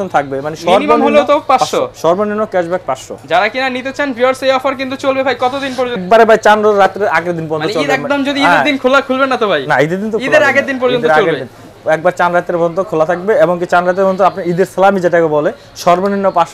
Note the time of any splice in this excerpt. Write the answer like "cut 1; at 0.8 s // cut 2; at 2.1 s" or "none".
none

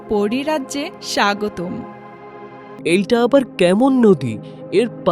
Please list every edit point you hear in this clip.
cut 1; at 2.7 s

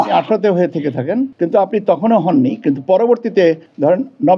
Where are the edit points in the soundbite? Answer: none

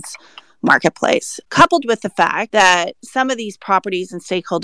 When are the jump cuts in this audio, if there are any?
cut 1; at 1.3 s // cut 2; at 2.4 s

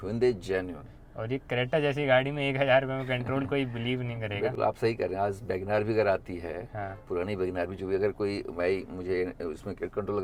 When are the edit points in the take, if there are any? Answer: none

